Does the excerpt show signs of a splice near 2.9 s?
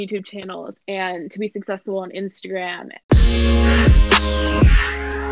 yes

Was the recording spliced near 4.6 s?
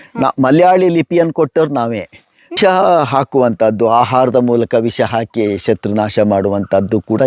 no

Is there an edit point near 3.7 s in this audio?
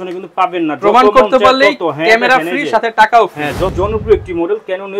yes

